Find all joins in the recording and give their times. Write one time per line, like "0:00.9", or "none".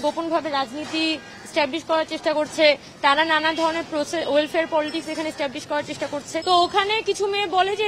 0:06.4

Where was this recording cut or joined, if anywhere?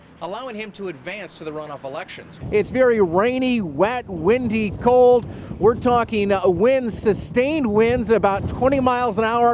0:02.4

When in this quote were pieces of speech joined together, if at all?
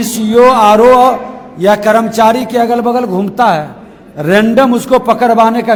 none

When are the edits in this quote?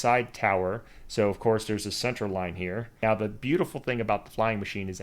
0:03.0

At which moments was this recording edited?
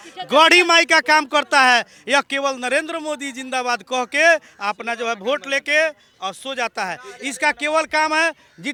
none

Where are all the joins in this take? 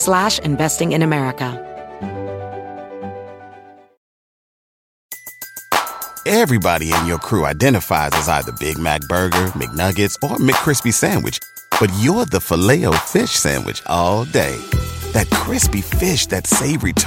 0:01.5

